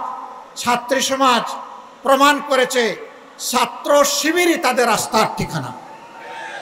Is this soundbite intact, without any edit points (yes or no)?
yes